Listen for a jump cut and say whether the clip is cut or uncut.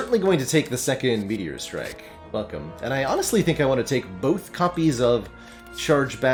uncut